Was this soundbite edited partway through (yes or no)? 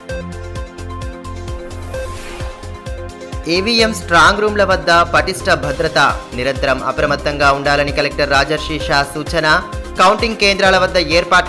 yes